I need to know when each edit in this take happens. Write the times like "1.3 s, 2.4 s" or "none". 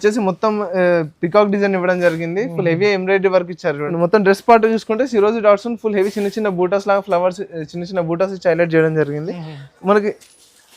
3.9 s